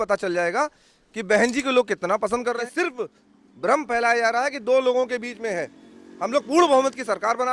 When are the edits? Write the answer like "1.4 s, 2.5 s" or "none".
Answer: 2.6 s

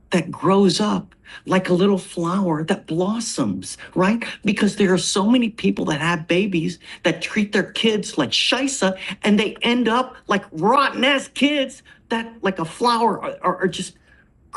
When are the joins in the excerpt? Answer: none

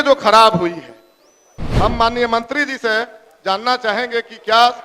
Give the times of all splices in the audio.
1.6 s

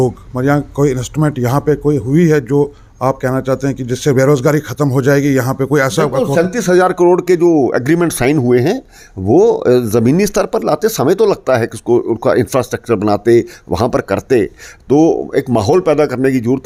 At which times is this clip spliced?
none

